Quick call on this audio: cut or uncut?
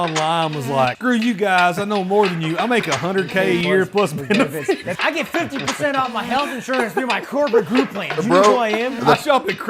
cut